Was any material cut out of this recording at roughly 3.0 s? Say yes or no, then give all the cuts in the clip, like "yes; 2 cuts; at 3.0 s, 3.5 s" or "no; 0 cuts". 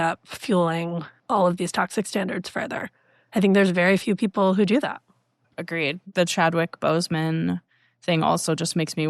no; 2 cuts; at 1.1 s, 5.5 s